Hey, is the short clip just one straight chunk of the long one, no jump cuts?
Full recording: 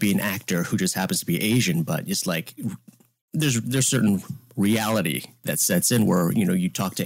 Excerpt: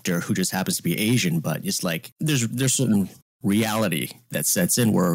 no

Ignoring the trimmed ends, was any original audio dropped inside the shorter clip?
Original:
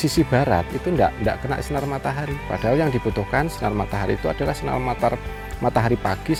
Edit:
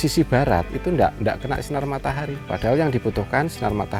no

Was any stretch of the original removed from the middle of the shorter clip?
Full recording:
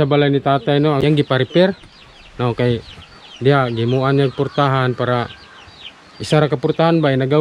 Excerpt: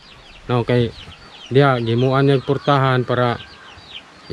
no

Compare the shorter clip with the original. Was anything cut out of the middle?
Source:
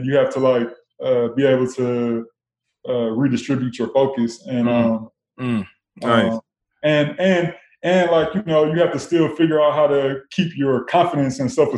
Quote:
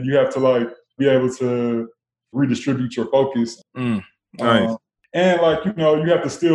yes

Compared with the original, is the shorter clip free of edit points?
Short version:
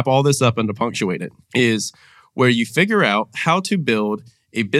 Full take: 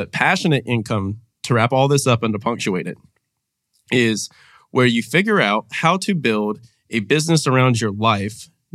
no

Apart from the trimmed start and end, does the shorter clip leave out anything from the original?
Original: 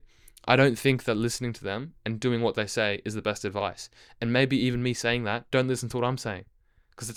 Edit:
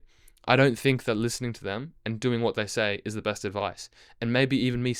no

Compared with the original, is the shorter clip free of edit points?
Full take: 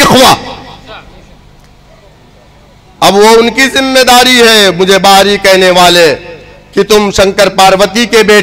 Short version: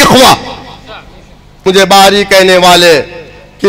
no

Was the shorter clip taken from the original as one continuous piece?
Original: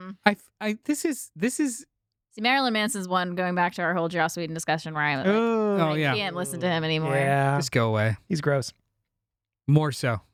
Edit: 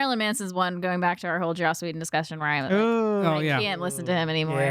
yes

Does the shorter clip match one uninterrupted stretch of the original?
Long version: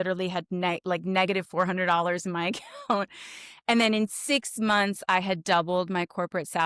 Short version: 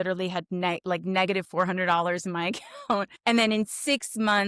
no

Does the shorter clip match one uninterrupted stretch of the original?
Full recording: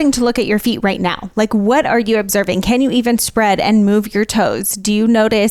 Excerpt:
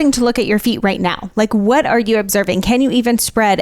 yes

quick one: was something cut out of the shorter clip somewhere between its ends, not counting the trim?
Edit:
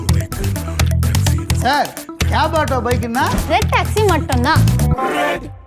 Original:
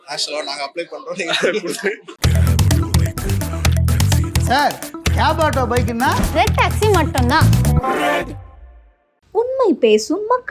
no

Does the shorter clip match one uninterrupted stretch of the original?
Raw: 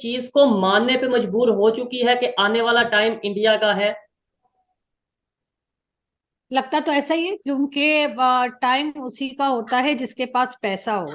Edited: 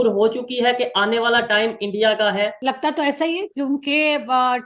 no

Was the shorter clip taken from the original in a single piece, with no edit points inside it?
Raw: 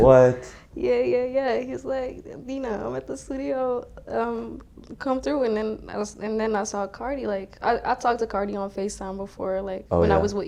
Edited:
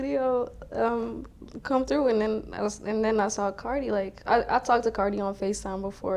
yes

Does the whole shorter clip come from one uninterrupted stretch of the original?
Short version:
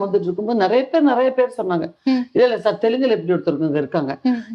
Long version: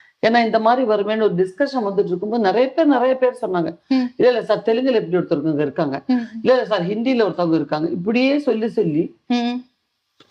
yes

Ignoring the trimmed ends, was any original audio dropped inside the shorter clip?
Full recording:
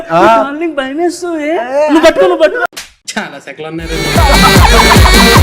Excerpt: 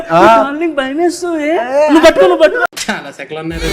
yes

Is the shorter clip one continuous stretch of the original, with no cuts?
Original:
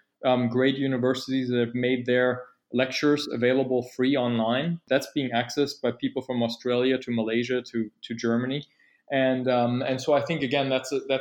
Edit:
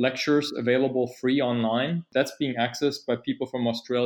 yes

